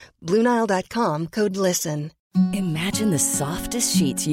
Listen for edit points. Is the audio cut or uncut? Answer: cut